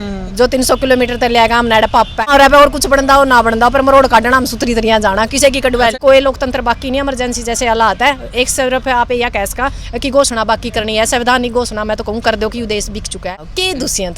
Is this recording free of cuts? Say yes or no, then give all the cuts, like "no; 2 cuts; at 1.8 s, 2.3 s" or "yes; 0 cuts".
no; 3 cuts; at 2.3 s, 5.9 s, 13.3 s